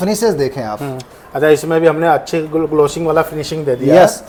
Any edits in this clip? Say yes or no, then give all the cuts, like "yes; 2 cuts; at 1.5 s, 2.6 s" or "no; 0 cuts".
no; 0 cuts